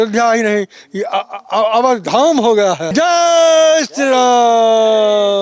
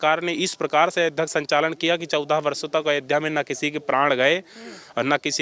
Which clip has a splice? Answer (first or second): first